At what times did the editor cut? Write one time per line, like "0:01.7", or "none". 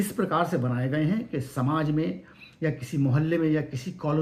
none